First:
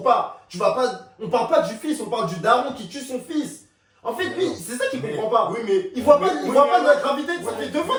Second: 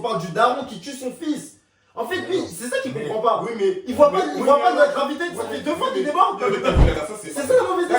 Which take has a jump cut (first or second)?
second